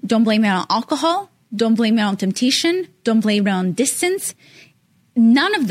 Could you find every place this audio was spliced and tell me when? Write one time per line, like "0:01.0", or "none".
none